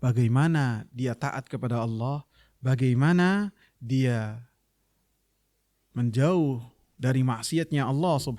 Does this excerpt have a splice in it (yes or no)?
no